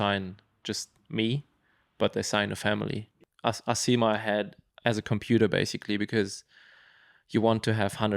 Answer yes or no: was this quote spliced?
yes